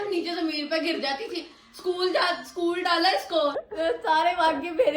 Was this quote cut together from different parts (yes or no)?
yes